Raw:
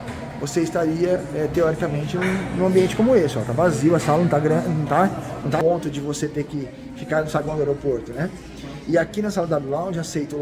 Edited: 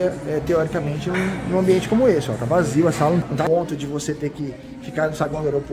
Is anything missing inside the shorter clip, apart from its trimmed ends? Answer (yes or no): yes